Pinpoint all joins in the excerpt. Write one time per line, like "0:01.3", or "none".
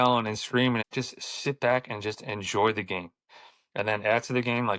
0:00.9
0:03.3

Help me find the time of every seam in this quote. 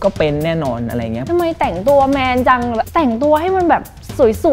0:01.2
0:02.9

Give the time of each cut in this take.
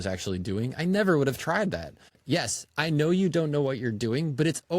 0:02.2

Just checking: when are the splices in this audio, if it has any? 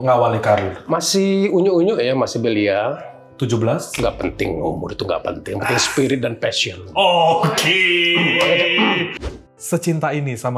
0:09.1

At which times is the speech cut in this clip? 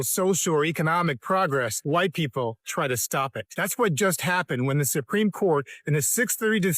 0:01.8
0:03.4

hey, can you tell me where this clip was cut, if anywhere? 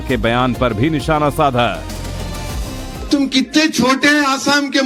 none

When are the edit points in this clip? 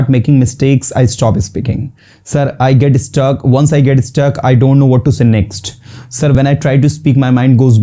0:06.4

